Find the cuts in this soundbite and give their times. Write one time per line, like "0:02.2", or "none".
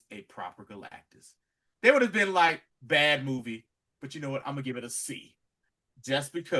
0:02.7